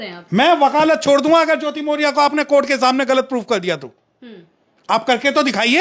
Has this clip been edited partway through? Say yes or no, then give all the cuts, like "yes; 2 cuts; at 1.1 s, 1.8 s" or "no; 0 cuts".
no; 0 cuts